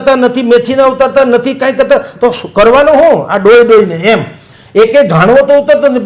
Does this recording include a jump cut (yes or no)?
no